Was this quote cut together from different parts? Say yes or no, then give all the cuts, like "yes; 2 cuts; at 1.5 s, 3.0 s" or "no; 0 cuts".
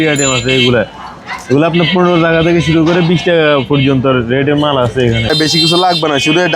yes; 1 cut; at 5.3 s